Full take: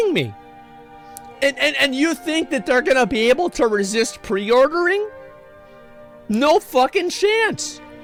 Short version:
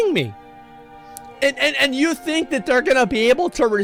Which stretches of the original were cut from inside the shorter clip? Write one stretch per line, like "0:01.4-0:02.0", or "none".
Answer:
none